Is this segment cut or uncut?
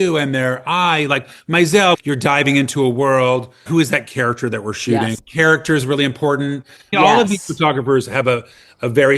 cut